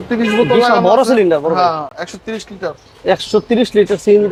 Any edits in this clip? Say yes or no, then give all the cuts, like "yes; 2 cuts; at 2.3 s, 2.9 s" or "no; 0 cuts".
no; 0 cuts